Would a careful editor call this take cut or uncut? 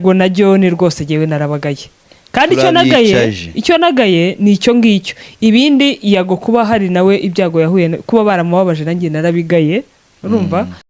uncut